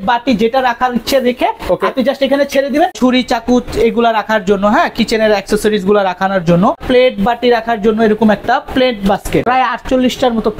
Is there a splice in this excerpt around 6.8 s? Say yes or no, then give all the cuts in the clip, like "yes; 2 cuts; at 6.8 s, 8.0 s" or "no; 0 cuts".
yes; 3 cuts; at 2.9 s, 6.8 s, 9.4 s